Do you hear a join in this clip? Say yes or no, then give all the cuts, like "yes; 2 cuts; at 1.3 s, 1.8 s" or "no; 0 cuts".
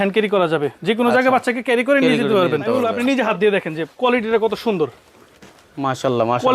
yes; 1 cut; at 2.8 s